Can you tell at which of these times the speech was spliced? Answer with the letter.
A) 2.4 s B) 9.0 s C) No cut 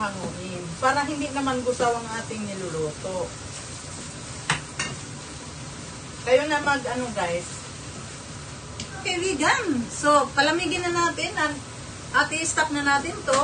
B